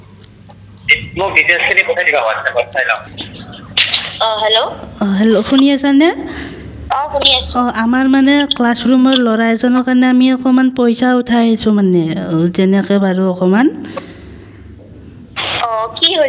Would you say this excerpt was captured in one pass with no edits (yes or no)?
no